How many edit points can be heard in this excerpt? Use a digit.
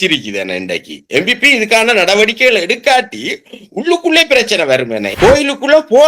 1